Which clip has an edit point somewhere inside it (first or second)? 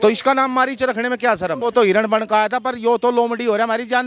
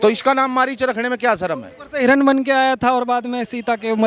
first